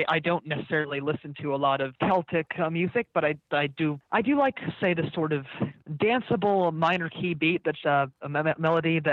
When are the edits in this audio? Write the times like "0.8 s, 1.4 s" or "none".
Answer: 1.9 s, 4.0 s, 5.8 s